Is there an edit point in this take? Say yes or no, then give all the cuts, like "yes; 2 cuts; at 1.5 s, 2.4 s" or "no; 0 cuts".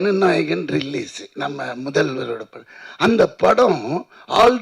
yes; 1 cut; at 1.2 s